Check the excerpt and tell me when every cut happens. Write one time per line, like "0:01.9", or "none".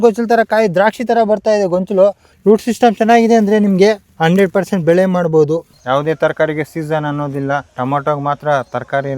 0:02.3
0:04.1
0:05.7
0:07.7